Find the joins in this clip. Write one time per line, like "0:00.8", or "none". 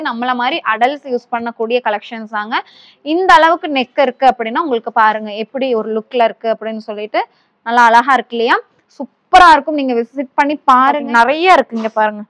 0:11.0